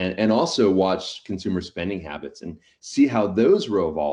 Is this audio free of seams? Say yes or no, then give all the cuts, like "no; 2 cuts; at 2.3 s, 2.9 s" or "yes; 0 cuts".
yes; 0 cuts